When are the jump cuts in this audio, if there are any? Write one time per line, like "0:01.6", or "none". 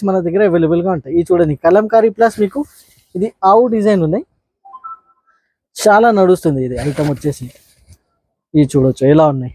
none